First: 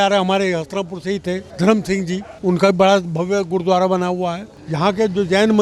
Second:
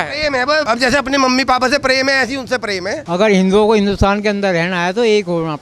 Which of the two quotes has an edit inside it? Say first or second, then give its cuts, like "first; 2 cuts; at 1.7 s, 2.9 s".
second; 1 cut; at 3.0 s